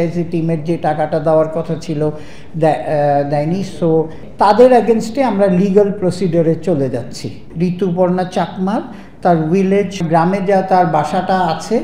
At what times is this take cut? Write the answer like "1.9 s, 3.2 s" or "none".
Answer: 4.2 s, 7.5 s, 10.0 s